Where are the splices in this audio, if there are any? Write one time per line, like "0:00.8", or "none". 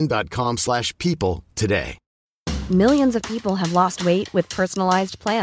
0:02.0